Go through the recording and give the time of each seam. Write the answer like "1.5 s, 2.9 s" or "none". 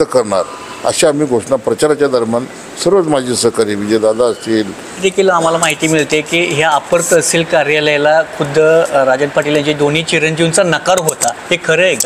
4.9 s